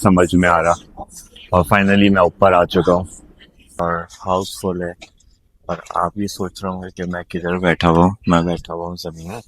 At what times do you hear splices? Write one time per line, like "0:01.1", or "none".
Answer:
0:03.8